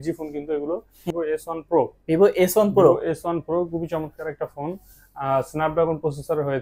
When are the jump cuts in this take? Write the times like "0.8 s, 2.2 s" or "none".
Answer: 1.1 s